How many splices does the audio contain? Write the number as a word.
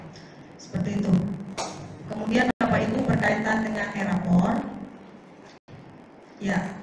zero